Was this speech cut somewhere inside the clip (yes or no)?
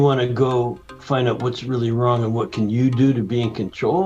no